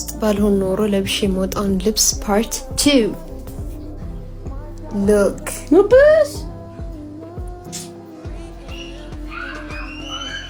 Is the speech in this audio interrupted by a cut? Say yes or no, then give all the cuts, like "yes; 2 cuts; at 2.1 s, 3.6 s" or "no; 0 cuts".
no; 0 cuts